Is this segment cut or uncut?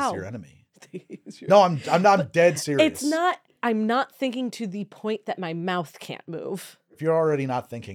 cut